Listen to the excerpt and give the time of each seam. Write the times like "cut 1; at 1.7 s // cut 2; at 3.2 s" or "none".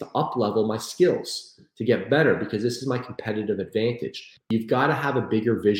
cut 1; at 4.5 s